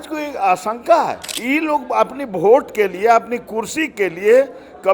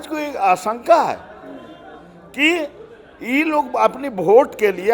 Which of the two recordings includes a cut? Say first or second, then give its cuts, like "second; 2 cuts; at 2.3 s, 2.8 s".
first; 1 cut; at 1.3 s